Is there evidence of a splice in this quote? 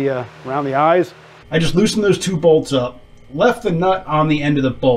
yes; 1 cut; at 1.4 s

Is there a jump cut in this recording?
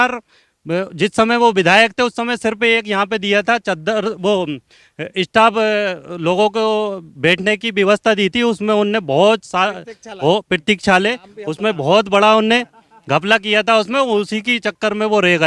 no; 0 cuts

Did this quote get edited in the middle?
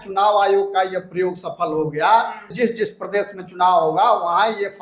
yes; 1 cut; at 2.5 s

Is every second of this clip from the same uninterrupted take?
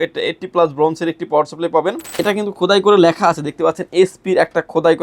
no; 1 cut; at 2.1 s

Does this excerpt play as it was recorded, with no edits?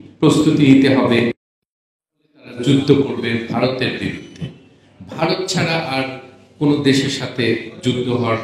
yes; 0 cuts

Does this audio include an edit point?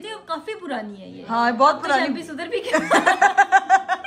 no; 0 cuts

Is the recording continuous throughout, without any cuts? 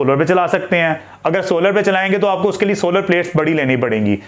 yes; 0 cuts

